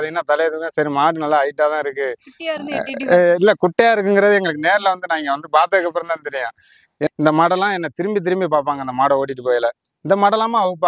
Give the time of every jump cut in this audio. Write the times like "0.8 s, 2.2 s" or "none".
7.1 s